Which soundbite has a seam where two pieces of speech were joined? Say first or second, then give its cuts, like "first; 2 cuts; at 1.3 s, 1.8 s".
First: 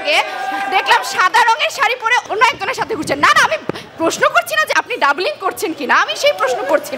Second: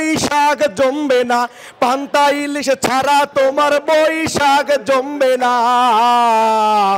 first; 1 cut; at 4.7 s